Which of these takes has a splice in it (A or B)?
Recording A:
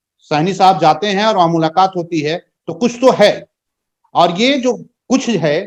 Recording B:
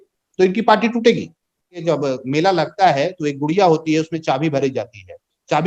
B